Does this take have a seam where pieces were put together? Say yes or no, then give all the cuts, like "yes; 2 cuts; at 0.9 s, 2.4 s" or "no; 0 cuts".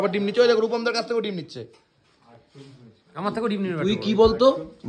no; 0 cuts